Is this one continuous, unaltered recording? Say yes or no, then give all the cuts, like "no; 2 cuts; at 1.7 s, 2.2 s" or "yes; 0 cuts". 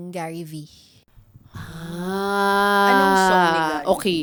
yes; 0 cuts